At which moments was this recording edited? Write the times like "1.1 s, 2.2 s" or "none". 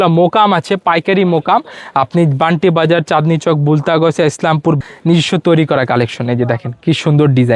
4.8 s